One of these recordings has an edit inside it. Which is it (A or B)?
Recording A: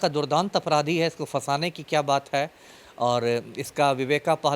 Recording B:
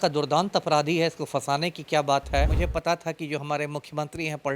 B